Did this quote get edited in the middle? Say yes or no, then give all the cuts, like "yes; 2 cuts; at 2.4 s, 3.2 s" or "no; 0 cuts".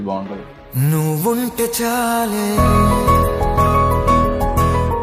no; 0 cuts